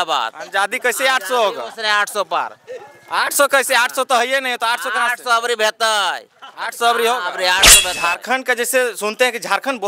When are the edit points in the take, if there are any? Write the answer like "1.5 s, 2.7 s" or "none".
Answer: 7.9 s